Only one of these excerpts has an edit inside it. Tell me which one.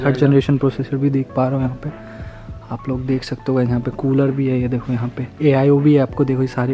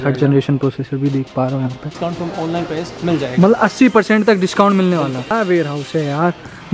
second; 2 cuts; at 1.9 s, 5.3 s

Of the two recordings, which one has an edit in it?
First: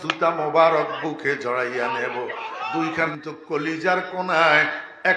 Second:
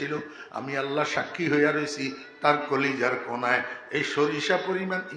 first; 1 cut; at 3.1 s

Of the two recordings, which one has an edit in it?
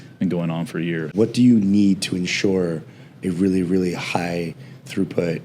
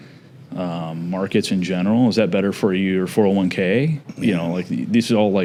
first; 1 cut; at 1.1 s

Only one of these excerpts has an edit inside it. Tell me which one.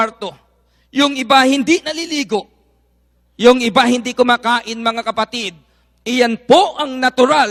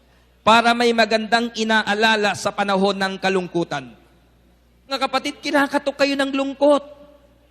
second; 1 cut; at 4.9 s

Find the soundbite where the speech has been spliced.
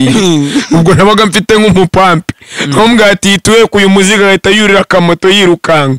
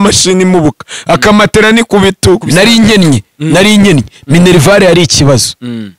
second; 1 cut; at 2.4 s

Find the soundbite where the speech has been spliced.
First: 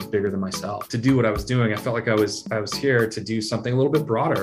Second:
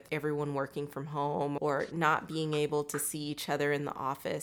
second; 1 cut; at 1.6 s

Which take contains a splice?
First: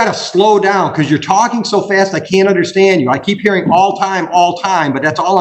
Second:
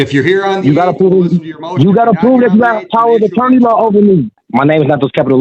second; 1 cut; at 4.4 s

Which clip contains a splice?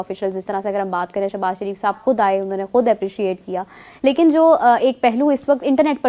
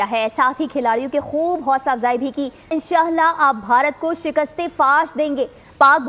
second; 1 cut; at 2.7 s

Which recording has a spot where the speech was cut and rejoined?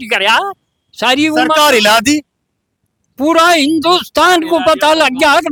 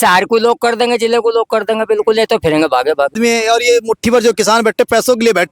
second; 1 cut; at 3.2 s

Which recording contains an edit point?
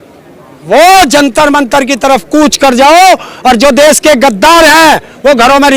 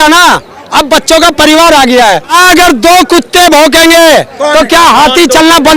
second; 1 cut; at 2.3 s

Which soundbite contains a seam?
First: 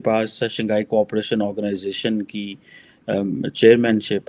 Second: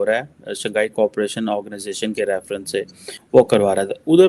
second; 1 cut; at 3.2 s

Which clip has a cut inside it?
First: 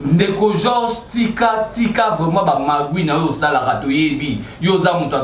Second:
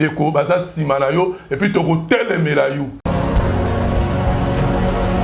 second; 1 cut; at 3.0 s

